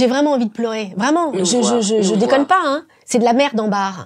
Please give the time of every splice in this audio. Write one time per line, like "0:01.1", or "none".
0:02.9